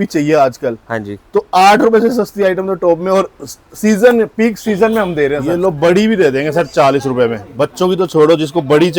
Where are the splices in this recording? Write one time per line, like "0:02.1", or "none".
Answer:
0:05.4